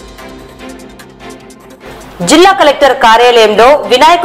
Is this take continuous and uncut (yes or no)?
yes